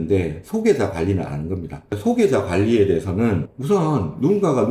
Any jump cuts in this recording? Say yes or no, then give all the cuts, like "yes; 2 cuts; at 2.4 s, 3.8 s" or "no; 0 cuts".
no; 0 cuts